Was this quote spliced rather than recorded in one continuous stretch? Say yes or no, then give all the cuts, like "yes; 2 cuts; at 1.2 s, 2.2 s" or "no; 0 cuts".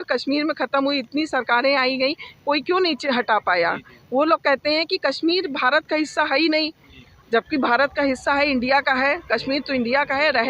no; 0 cuts